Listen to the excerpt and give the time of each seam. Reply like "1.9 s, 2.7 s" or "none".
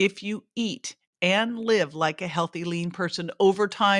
1.1 s